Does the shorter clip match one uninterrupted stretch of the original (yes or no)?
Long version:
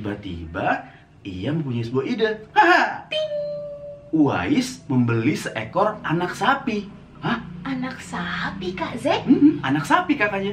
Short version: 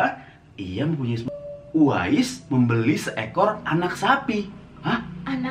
no